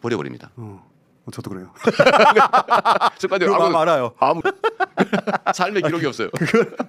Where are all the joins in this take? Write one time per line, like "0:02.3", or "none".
0:04.4